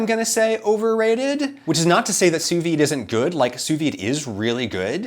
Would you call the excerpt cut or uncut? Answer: cut